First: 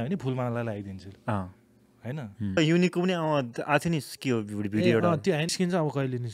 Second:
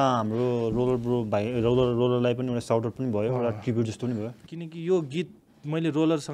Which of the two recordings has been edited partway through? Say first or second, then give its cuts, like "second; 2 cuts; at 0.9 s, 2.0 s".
first; 2 cuts; at 2.6 s, 5.5 s